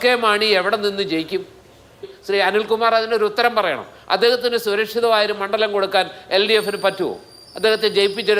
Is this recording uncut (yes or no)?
no